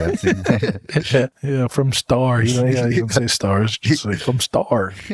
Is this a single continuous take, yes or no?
no